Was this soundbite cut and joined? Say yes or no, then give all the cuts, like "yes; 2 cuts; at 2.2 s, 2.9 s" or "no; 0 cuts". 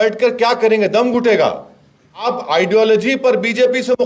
yes; 1 cut; at 2.2 s